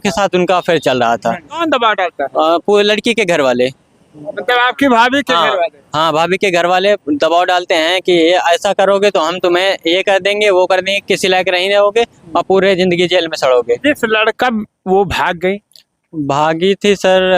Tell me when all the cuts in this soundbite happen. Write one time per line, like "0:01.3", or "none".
0:01.6
0:14.4